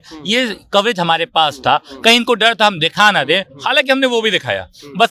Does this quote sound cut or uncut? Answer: uncut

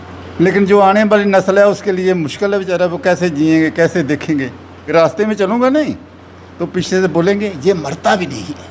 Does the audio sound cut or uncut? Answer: cut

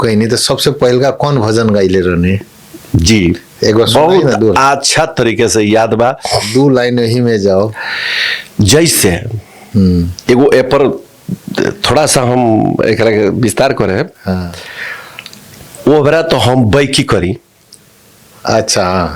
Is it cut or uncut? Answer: uncut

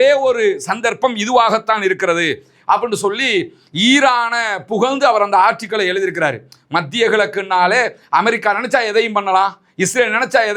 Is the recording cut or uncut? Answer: uncut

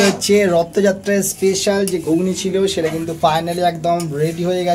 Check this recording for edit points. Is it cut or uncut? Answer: uncut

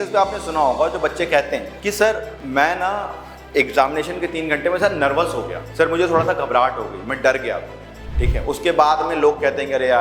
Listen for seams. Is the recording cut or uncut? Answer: cut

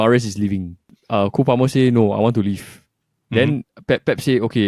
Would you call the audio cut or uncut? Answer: cut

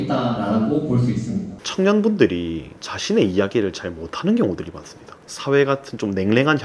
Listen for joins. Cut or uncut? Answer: cut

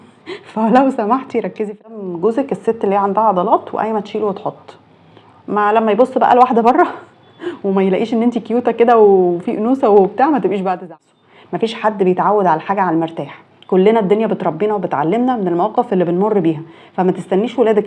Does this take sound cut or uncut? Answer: cut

